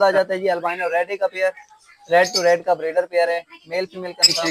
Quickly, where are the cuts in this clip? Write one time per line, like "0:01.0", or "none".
none